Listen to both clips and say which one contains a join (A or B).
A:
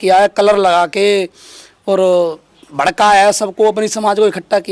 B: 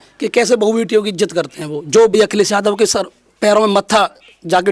B